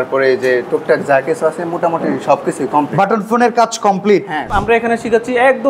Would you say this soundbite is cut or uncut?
cut